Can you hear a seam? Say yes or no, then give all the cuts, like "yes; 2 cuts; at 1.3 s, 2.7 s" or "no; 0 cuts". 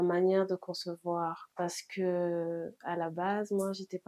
yes; 1 cut; at 1.4 s